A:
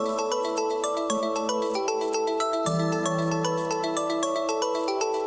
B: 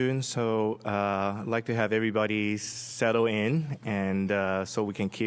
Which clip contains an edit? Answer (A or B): A